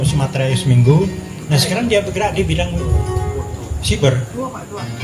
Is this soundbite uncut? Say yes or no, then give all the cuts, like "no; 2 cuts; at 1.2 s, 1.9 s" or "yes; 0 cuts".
yes; 0 cuts